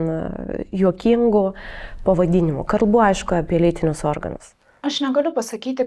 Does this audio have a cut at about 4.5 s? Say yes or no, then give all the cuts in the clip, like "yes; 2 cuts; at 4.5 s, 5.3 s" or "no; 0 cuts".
no; 0 cuts